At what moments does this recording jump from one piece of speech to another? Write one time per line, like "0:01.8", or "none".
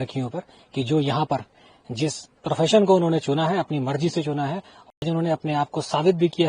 0:05.0